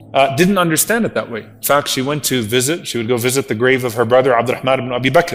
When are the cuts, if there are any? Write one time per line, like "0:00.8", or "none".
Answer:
none